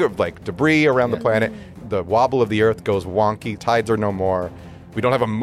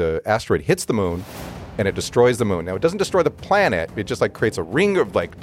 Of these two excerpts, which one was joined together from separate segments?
first; 2 cuts; at 1.7 s, 3.5 s

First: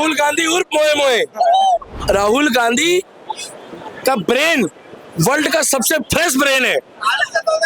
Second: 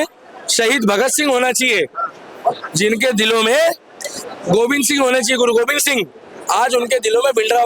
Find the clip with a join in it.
first; 1 cut; at 1.9 s

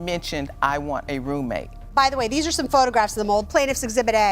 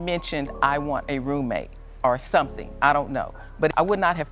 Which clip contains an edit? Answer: first; 1 cut; at 1.7 s

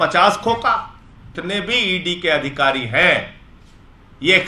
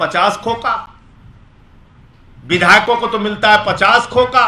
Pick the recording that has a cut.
first; 1 cut; at 1.4 s

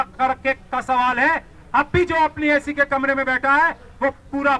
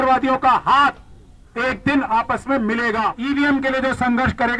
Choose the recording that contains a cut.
second; 1 cut; at 3.1 s

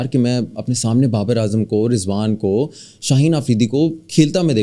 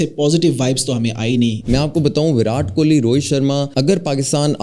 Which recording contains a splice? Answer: second; 2 cuts; at 1.6 s, 3.7 s

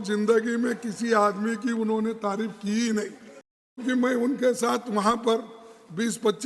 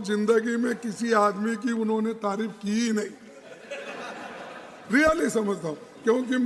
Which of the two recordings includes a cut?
first; 1 cut; at 3.8 s

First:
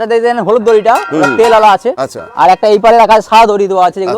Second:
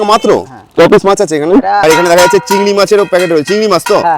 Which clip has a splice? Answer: second; 1 cut; at 1.8 s

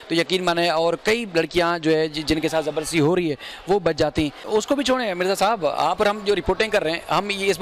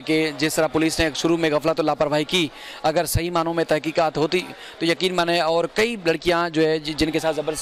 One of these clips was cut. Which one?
first; 1 cut; at 4.4 s

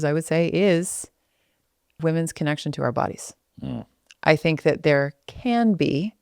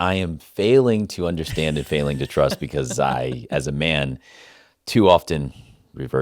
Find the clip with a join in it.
first; 1 cut; at 1.9 s

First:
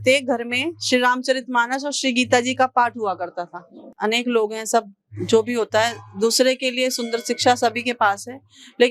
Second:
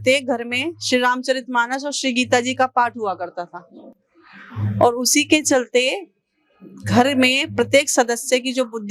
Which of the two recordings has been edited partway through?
first; 1 cut; at 3.9 s

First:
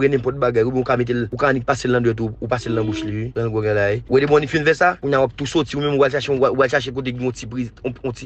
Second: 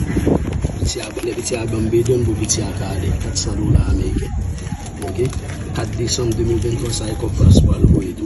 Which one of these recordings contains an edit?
first; 4 cuts; at 1.3 s, 3.2 s, 4.0 s, 5.0 s

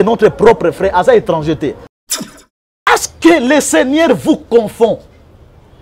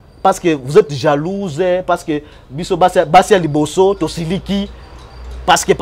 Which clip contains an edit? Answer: first; 1 cut; at 2.2 s

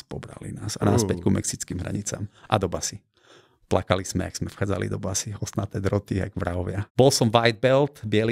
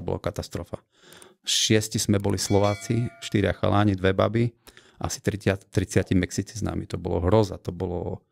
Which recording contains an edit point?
first; 1 cut; at 6.8 s

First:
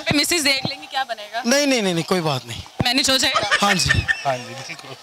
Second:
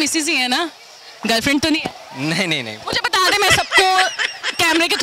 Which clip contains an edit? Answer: first; 1 cut; at 4.1 s

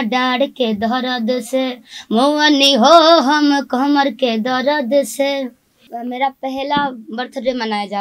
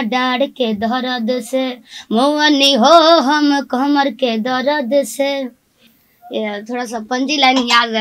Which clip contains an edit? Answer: first; 1 cut; at 5.9 s

